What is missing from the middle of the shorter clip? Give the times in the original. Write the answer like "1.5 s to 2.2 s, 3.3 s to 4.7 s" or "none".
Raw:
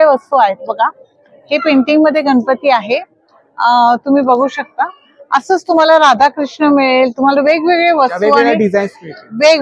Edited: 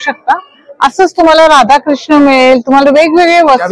none